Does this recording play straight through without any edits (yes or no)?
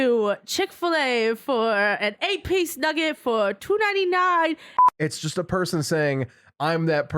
no